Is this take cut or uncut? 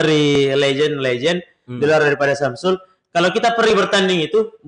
uncut